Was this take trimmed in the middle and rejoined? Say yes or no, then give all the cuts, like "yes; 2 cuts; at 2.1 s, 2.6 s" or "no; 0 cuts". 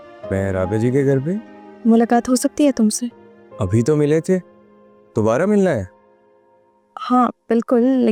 no; 0 cuts